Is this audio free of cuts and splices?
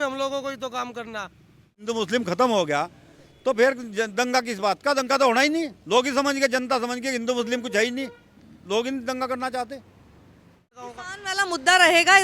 no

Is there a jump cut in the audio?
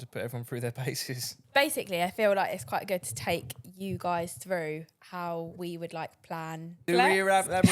yes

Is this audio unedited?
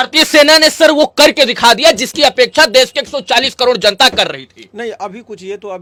yes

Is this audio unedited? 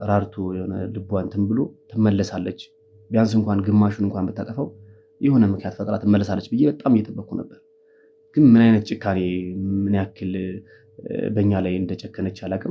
yes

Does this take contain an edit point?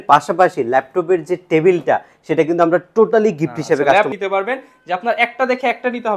yes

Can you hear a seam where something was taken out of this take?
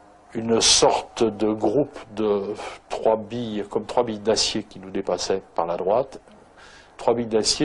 yes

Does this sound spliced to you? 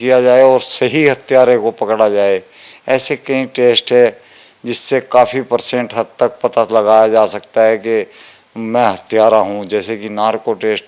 no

